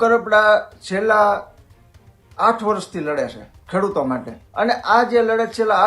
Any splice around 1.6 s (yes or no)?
no